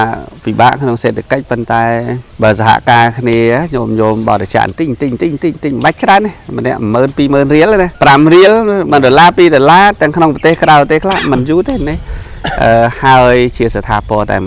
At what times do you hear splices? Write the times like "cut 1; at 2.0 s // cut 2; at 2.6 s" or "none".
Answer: cut 1; at 2.2 s // cut 2; at 7.9 s